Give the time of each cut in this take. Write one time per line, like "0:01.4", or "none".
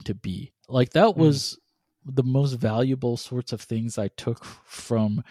none